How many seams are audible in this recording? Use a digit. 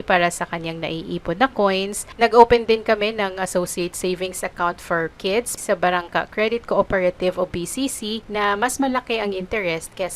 3